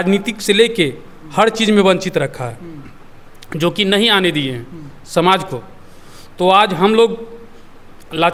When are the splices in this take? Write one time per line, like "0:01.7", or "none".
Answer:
none